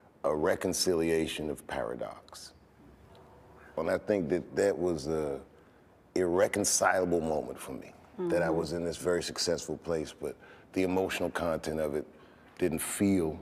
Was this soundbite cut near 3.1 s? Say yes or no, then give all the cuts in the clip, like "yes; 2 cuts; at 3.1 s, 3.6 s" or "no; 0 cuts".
no; 0 cuts